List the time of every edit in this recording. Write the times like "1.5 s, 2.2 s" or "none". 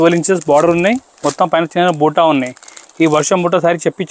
none